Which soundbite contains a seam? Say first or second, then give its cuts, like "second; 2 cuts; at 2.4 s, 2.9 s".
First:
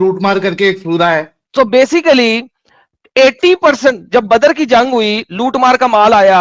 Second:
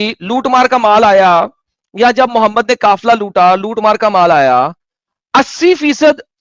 first; 1 cut; at 1.4 s